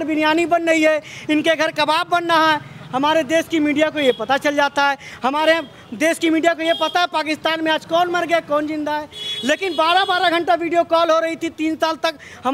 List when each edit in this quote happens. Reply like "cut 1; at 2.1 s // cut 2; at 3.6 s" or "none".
none